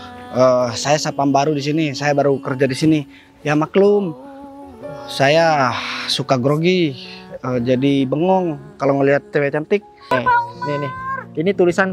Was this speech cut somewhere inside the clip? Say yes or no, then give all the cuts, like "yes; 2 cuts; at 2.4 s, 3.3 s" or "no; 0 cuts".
yes; 1 cut; at 10.1 s